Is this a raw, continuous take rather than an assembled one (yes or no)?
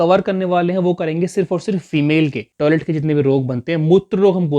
no